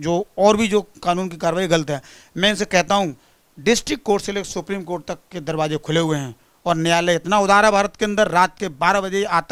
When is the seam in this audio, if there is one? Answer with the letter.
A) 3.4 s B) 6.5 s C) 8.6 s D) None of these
D